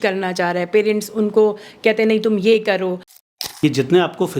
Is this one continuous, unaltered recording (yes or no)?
no